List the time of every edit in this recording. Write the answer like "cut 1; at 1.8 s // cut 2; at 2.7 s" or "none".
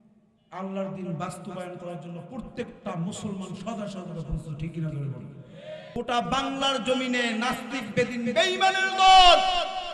cut 1; at 5.8 s